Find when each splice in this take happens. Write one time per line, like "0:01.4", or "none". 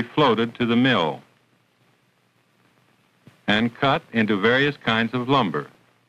none